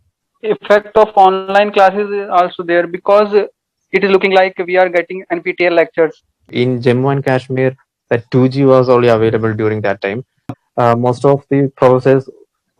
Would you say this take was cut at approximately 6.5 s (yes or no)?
yes